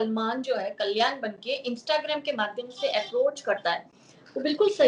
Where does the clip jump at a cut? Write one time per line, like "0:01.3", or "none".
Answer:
none